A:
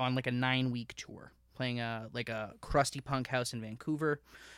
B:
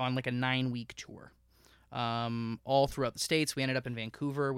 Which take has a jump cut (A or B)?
A